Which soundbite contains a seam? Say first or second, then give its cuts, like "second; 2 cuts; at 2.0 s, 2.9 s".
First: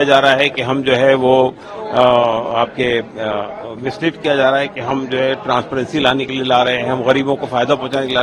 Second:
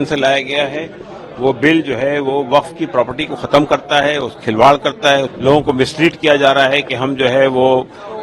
second; 1 cut; at 5.3 s